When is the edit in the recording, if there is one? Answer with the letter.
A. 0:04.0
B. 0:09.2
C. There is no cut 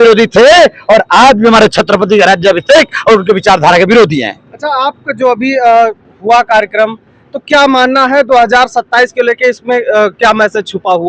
C